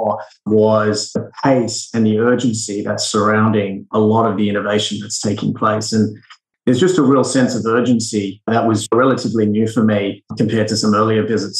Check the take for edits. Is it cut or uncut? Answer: cut